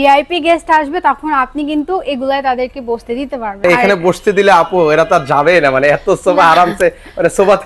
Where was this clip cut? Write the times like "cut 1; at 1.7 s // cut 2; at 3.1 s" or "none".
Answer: cut 1; at 3.6 s